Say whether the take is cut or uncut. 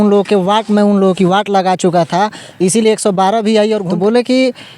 cut